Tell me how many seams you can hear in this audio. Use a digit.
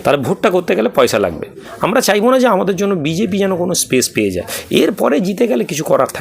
1